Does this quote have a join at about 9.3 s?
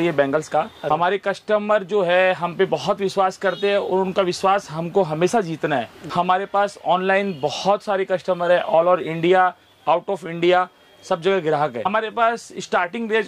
no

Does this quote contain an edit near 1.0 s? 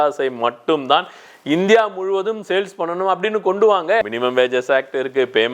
no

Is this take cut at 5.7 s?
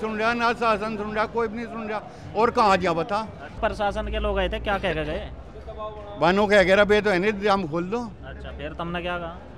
no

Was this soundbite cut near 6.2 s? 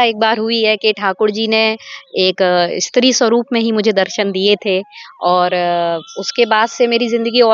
no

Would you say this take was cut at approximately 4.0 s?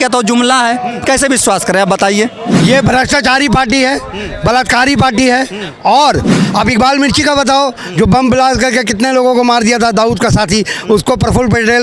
no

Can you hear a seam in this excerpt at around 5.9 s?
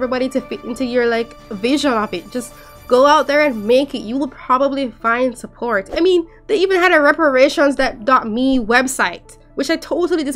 yes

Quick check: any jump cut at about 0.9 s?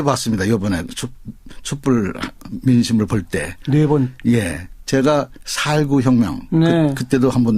yes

